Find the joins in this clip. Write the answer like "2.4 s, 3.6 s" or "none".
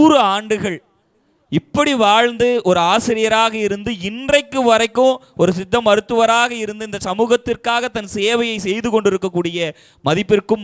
none